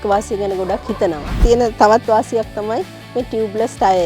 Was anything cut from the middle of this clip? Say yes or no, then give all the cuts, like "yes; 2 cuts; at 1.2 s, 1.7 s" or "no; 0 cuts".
yes; 1 cut; at 1.4 s